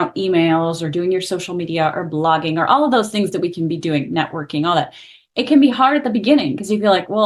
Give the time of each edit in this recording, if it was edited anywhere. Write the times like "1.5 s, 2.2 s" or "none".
none